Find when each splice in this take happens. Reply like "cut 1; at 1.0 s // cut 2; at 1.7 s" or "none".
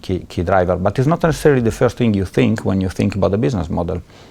none